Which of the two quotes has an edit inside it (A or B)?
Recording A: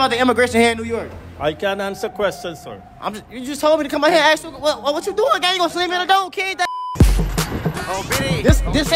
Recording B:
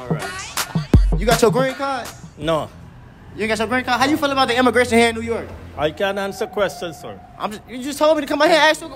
A